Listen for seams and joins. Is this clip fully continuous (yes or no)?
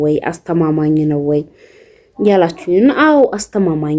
yes